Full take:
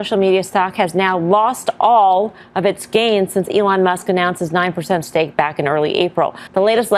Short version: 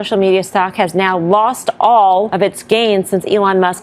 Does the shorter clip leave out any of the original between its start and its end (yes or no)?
yes